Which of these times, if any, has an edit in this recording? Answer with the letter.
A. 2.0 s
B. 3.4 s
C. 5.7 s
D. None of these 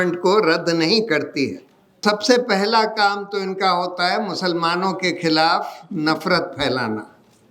A